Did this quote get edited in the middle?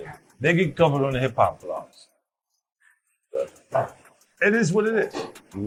no; 0 cuts

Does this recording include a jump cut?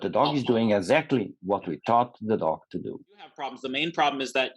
yes; 1 cut; at 3.6 s

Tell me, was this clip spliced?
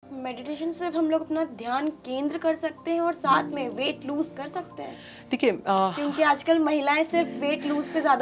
no; 0 cuts

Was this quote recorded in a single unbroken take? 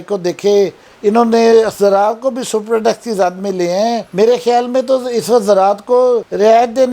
yes; 0 cuts

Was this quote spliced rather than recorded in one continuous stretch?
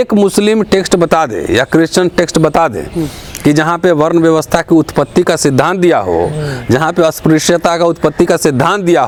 no; 0 cuts

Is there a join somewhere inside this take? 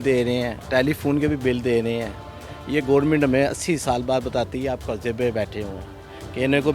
no; 0 cuts

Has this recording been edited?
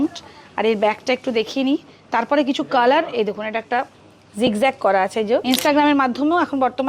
yes; 1 cut; at 5.4 s

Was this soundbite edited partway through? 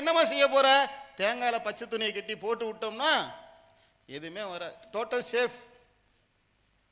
no; 0 cuts

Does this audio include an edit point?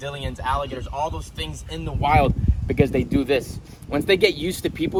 no; 0 cuts

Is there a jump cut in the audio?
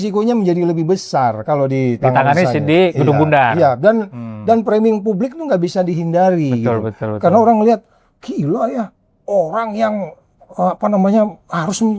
no; 0 cuts

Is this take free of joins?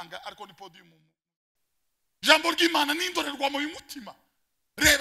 no; 1 cut; at 1.4 s

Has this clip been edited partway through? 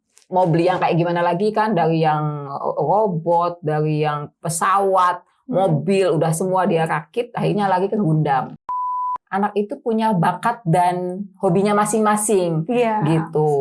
yes; 1 cut; at 8.9 s

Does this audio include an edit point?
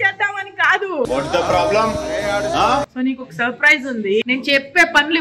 yes; 2 cuts; at 2.9 s, 4.2 s

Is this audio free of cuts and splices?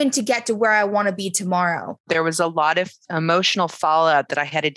no; 2 cuts; at 2.1 s, 3.0 s

